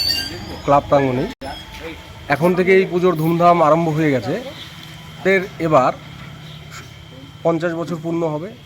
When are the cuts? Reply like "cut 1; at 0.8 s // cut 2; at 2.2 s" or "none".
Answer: cut 1; at 5.2 s